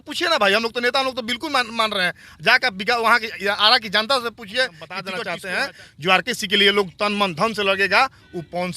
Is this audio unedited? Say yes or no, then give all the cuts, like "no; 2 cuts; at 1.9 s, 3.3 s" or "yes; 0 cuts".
no; 1 cut; at 5.1 s